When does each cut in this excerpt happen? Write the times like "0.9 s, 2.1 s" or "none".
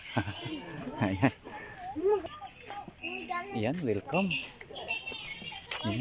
none